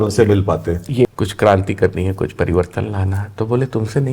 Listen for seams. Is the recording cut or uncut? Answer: cut